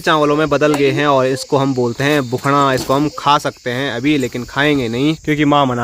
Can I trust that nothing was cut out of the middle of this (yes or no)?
yes